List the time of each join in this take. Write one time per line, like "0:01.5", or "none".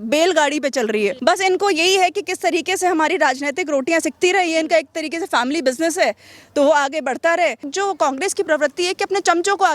0:01.2
0:07.7